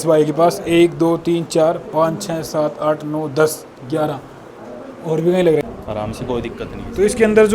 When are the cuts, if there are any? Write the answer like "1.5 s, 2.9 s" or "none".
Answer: 5.6 s